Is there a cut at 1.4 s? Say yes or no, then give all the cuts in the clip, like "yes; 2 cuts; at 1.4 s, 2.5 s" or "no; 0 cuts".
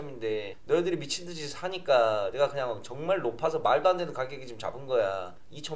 no; 0 cuts